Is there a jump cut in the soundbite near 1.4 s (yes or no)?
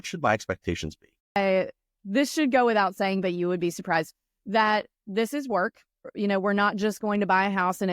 yes